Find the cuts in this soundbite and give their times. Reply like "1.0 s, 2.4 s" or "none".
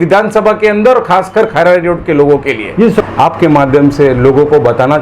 3.0 s

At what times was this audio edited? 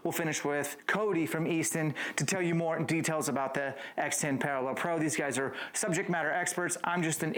none

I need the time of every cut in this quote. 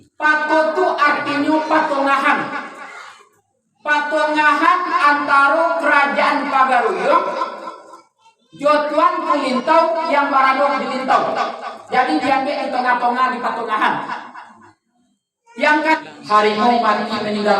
16.0 s

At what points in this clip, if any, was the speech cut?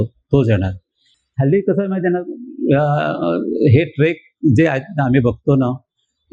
1.1 s

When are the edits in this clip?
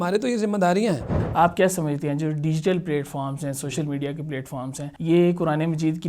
1.1 s, 4.9 s

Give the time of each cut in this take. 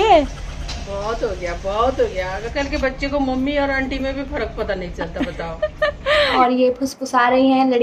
2.4 s, 6.3 s

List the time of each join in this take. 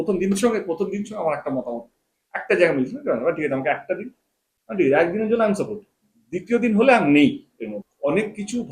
7.8 s

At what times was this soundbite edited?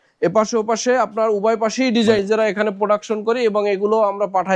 2.2 s

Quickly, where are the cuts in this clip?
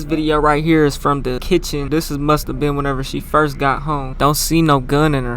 1.6 s, 4.1 s

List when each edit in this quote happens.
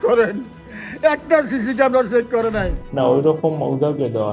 2.8 s

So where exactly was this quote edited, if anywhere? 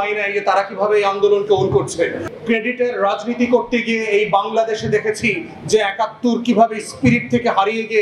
2.2 s

